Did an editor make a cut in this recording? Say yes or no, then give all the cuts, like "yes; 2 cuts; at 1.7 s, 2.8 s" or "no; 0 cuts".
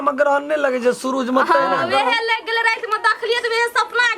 no; 0 cuts